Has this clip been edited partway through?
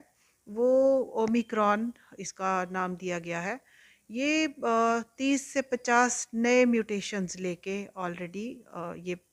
no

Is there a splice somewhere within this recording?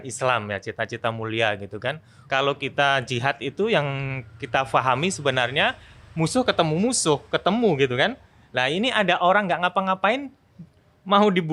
yes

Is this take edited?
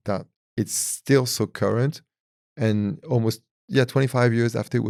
no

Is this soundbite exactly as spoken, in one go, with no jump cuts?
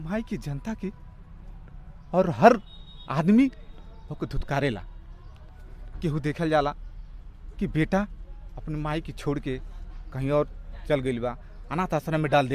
yes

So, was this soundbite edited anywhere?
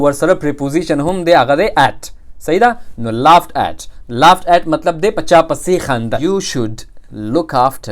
yes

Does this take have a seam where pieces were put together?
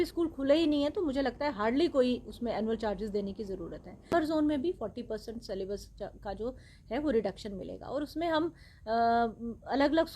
yes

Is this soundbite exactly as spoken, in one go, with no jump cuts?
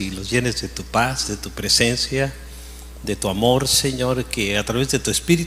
yes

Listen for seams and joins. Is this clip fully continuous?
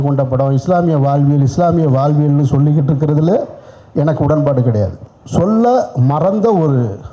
no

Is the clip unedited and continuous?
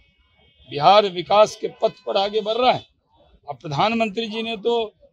yes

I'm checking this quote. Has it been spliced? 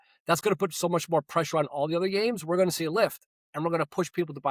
no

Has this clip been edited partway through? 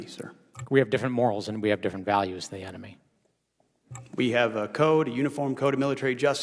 no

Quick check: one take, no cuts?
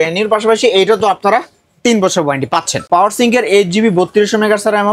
no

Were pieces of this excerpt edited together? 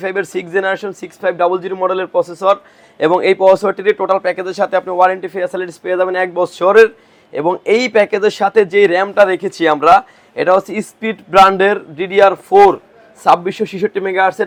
no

